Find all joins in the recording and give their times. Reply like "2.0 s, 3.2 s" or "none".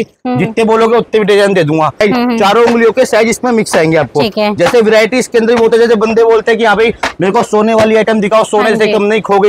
2.0 s